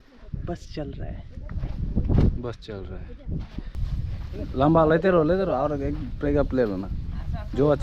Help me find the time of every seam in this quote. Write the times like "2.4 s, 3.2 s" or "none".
3.8 s